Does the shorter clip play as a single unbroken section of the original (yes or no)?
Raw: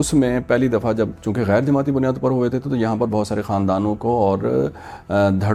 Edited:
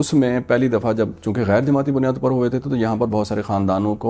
yes